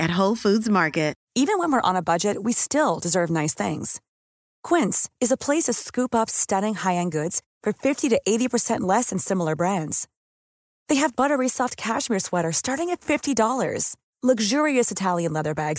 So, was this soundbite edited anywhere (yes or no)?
yes